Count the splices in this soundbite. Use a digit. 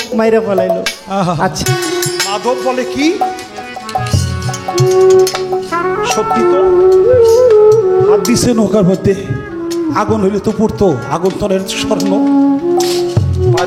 1